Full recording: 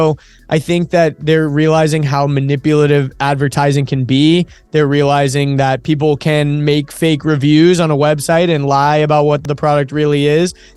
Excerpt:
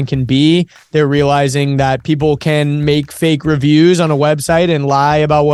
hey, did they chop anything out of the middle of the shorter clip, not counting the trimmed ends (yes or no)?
no